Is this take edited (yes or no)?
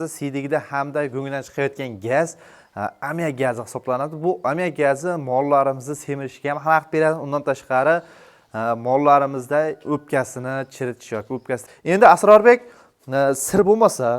yes